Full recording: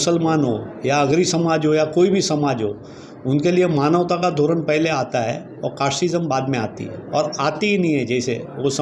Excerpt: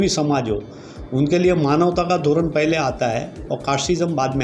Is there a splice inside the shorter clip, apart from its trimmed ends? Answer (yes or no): no